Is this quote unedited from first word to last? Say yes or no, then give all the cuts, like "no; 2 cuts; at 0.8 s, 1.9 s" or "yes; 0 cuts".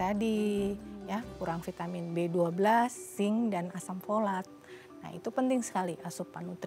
yes; 0 cuts